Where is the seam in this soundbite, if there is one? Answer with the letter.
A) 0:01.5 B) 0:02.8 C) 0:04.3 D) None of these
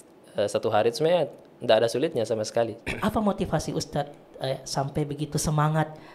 B